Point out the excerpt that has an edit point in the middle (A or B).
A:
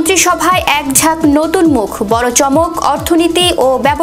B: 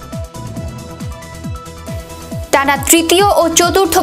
B